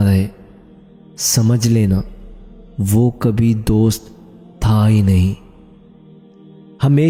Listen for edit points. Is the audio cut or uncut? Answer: uncut